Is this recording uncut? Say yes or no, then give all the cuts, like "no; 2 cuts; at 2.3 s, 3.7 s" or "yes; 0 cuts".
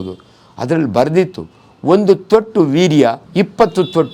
no; 1 cut; at 3.2 s